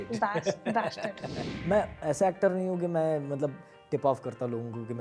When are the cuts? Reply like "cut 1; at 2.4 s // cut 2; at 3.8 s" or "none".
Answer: cut 1; at 1.5 s